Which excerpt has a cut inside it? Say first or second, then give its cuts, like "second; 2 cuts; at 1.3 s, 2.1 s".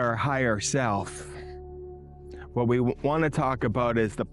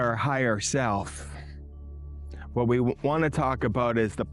first; 2 cuts; at 1.1 s, 2.5 s